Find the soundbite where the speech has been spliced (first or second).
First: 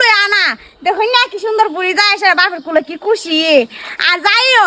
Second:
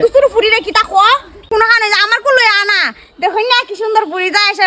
second